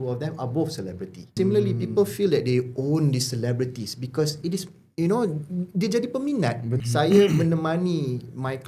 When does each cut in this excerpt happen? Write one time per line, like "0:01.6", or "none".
0:01.3
0:06.7